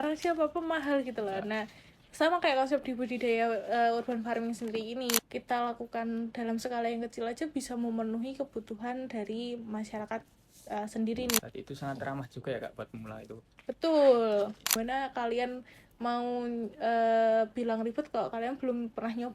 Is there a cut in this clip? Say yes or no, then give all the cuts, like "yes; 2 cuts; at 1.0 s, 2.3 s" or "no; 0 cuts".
yes; 3 cuts; at 5.2 s, 11.4 s, 14.8 s